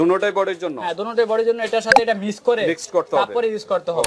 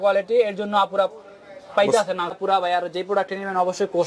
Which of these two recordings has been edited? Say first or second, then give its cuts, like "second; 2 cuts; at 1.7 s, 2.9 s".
second; 1 cut; at 2.4 s